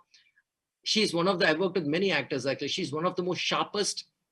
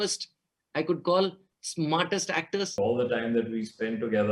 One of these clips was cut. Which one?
second; 1 cut; at 2.8 s

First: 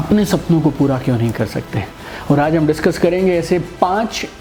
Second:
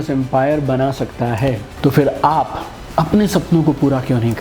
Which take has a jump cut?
second; 1 cut; at 1.7 s

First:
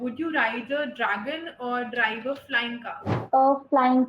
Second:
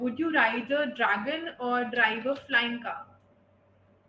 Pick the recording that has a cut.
first; 1 cut; at 3.2 s

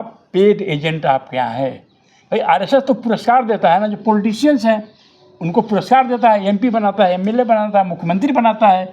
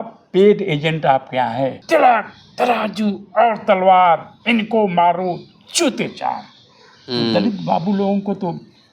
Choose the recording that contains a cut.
second; 1 cut; at 1.8 s

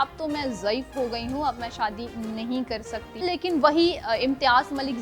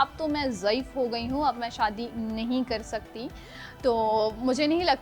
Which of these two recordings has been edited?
first; 1 cut; at 3.1 s

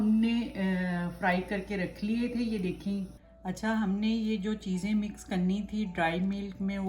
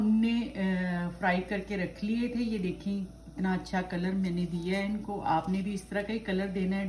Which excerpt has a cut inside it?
first; 1 cut; at 3.2 s

